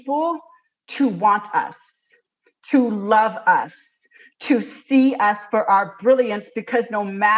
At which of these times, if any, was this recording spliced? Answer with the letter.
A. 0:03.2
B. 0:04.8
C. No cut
C